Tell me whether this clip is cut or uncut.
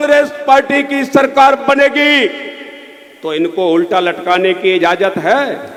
uncut